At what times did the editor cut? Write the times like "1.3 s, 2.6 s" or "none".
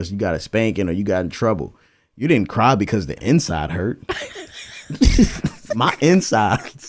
none

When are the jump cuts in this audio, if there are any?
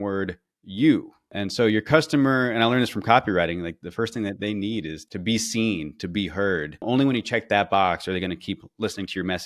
1.3 s, 3.8 s, 5.0 s, 6.8 s

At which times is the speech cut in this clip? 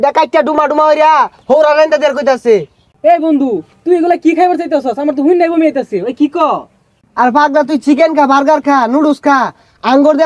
none

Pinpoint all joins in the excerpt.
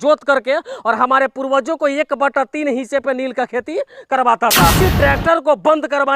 4.8 s

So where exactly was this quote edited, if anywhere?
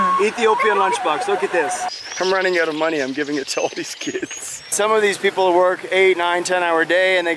1.9 s, 4.7 s

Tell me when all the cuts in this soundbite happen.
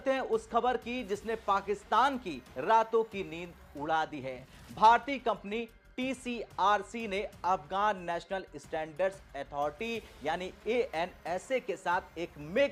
none

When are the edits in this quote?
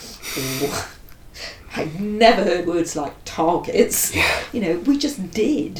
2.6 s

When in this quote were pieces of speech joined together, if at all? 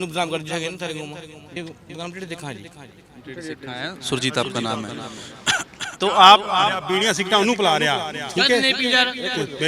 1.6 s

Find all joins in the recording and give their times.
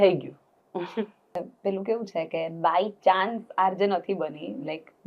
1.4 s

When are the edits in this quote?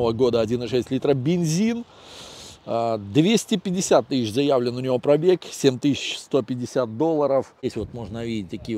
7.6 s

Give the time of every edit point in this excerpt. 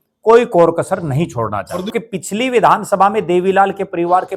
1.9 s

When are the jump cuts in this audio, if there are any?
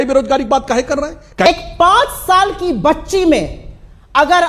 1.5 s

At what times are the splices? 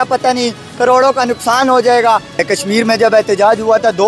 2.4 s

